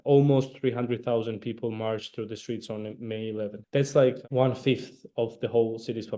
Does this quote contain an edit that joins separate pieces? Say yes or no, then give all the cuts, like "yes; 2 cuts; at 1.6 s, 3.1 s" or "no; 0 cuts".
yes; 2 cuts; at 3.6 s, 4.2 s